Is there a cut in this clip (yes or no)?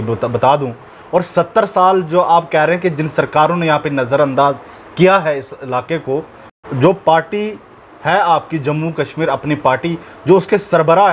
yes